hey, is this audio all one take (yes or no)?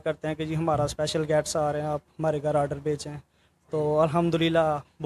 yes